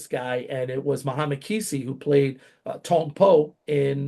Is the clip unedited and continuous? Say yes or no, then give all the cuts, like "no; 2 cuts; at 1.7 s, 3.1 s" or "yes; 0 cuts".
yes; 0 cuts